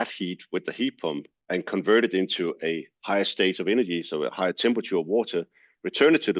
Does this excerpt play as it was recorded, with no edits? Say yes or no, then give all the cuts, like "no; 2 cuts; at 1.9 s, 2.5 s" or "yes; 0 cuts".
no; 1 cut; at 1.3 s